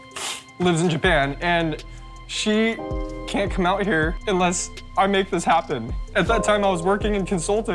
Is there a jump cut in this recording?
yes; 2 cuts; at 4.2 s, 5.9 s

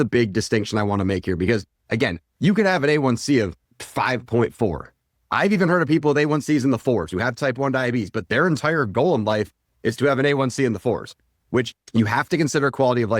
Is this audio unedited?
no; 1 cut; at 11.7 s

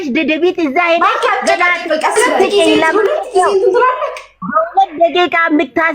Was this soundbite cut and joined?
yes; 1 cut; at 2.2 s

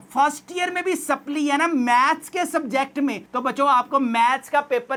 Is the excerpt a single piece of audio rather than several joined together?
yes; 0 cuts

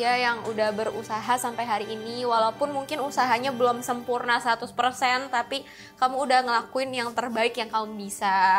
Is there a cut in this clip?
no; 0 cuts

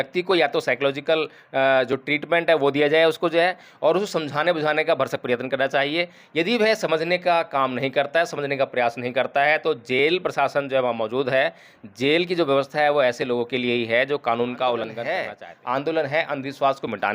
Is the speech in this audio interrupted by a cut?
yes; 1 cut; at 15.0 s

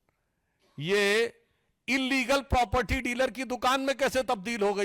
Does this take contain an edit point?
no; 0 cuts

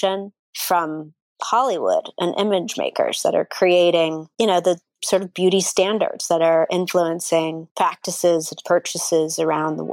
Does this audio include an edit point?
no; 0 cuts

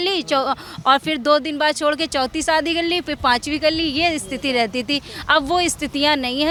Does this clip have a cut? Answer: no; 0 cuts

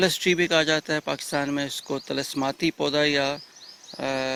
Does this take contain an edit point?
no; 0 cuts

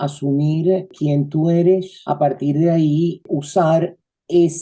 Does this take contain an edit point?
yes; 1 cut; at 3.4 s

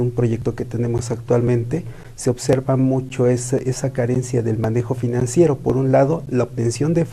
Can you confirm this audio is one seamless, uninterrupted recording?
yes; 0 cuts

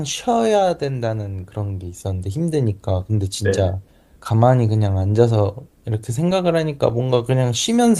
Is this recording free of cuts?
yes; 0 cuts

